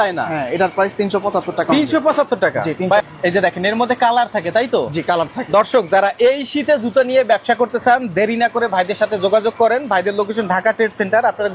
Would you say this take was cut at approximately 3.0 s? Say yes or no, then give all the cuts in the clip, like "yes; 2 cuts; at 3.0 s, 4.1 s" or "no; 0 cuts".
yes; 1 cut; at 3.0 s